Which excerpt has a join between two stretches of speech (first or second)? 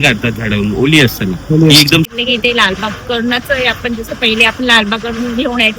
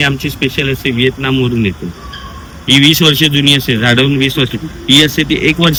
first